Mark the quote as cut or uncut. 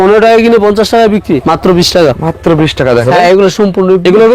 cut